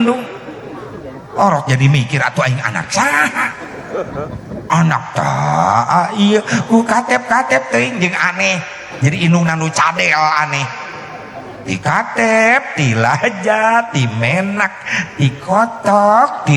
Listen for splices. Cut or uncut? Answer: cut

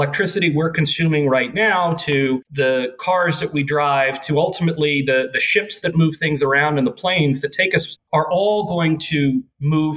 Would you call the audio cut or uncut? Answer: uncut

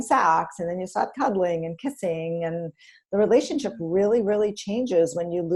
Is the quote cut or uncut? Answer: uncut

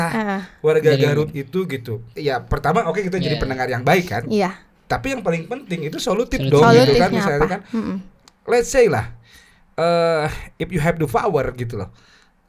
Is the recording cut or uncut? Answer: cut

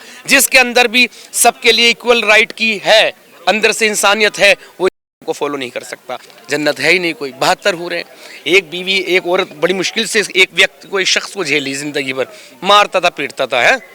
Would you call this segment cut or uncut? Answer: cut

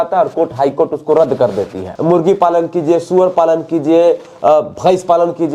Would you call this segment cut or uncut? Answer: cut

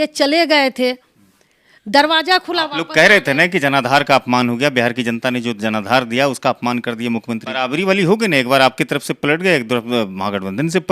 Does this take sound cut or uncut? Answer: cut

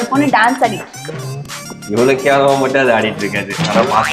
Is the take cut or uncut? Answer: uncut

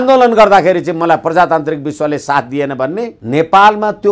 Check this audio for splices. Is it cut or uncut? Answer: cut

